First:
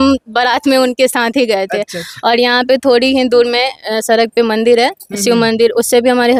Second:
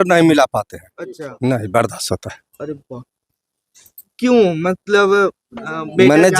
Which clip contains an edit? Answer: second; 1 cut; at 4.1 s

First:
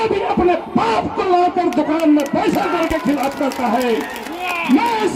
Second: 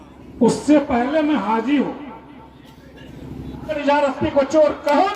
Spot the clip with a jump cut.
second; 1 cut; at 3.7 s

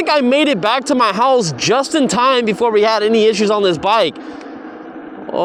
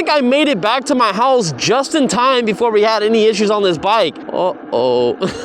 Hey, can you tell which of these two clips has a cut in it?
second; 1 cut; at 4.2 s

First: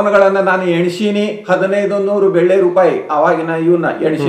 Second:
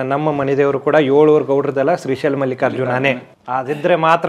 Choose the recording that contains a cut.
second; 1 cut; at 3.3 s

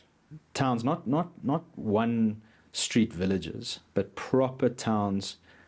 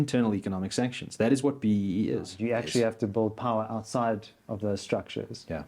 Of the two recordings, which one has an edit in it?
second; 1 cut; at 2.3 s

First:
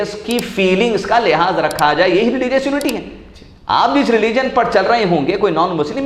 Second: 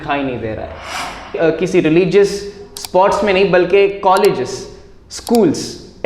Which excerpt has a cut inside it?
second; 1 cut; at 1.4 s

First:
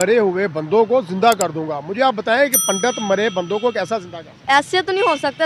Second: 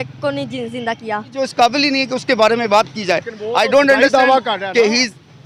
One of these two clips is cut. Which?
second; 1 cut; at 1.4 s

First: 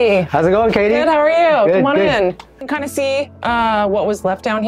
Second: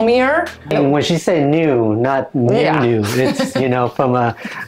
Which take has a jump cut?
first; 1 cut; at 2.6 s

